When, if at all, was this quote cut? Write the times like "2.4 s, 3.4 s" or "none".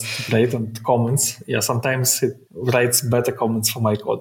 2.5 s